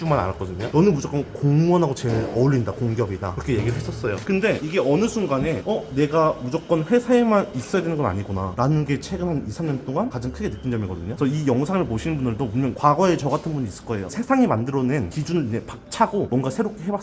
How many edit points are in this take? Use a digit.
1